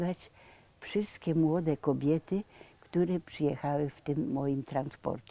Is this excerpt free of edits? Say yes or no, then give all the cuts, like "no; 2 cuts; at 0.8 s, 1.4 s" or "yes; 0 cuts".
yes; 0 cuts